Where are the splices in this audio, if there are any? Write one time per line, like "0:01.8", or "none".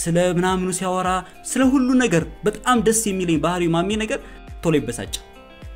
0:04.5